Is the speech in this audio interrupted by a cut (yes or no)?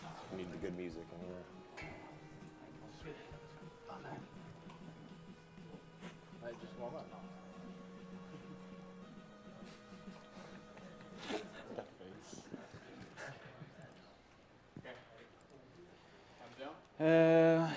no